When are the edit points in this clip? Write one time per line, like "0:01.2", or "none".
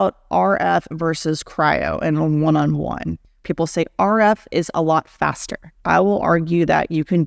0:03.4
0:05.7